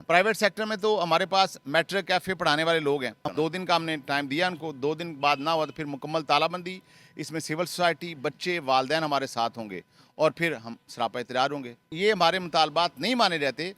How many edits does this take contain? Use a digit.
2